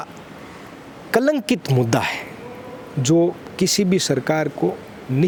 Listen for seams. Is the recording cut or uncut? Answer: uncut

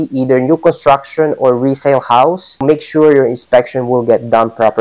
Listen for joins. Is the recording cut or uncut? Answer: cut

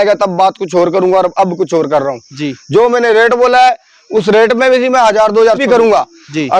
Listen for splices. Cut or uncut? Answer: cut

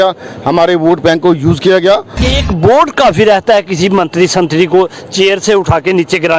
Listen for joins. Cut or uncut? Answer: cut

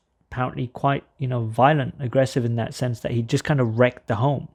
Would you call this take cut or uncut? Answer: uncut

